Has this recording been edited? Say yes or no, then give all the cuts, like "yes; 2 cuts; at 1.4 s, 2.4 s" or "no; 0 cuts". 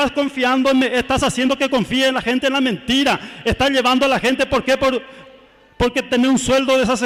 no; 0 cuts